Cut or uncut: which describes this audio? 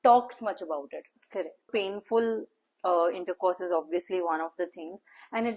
cut